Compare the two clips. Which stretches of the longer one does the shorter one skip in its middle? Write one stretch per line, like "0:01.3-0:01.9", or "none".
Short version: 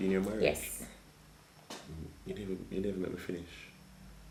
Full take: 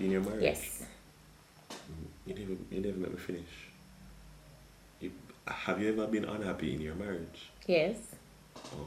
none